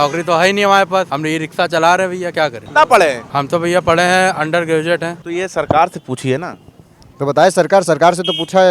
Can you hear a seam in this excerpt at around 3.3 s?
yes; 4 cuts; at 1.1 s, 2.6 s, 3.3 s, 5.2 s

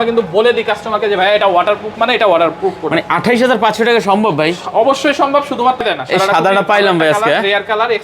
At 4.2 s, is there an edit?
no; 1 cut; at 5.8 s

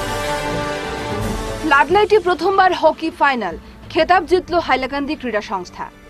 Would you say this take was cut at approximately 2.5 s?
no; 1 cut; at 1.0 s

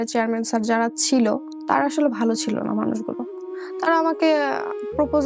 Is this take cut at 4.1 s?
no; 1 cut; at 1.5 s

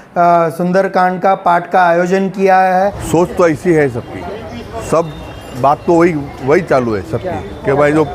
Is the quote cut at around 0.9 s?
no; 2 cuts; at 3.0 s, 4.7 s

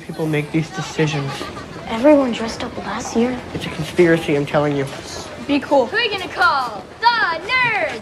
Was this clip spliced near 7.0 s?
no; 0 cuts

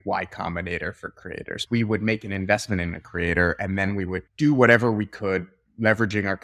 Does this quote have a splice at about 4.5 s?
no; 1 cut; at 1.6 s

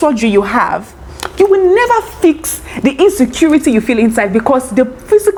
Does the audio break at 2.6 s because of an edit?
no; 0 cuts

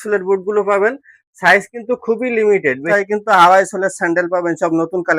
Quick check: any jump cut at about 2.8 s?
yes; 1 cut; at 2.8 s

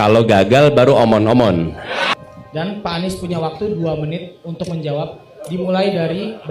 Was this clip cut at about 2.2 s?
no; 0 cuts

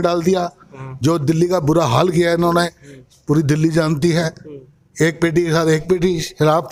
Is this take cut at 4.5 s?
no; 0 cuts

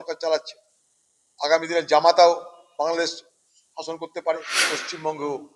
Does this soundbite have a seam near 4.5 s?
yes; 1 cut; at 4.5 s

